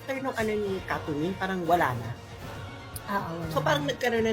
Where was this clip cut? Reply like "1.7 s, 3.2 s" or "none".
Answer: none